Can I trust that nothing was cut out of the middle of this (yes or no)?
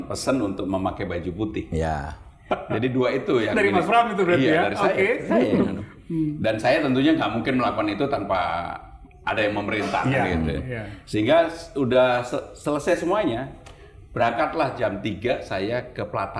yes